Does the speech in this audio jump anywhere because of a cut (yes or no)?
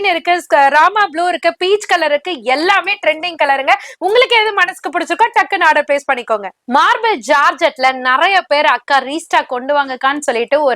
yes